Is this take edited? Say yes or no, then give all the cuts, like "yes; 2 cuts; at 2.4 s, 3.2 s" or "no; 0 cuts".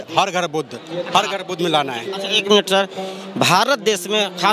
no; 0 cuts